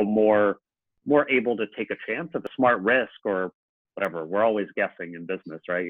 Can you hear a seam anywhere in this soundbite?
yes; 1 cut; at 2.5 s

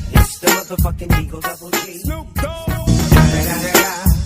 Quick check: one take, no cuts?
no; 2 cuts; at 1.6 s, 2.5 s

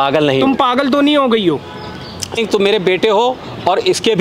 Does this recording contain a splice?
yes; 1 cut; at 2.4 s

